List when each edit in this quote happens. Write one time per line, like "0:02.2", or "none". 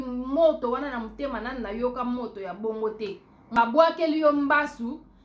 0:03.6